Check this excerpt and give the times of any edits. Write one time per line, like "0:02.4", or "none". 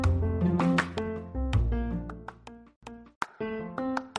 0:02.6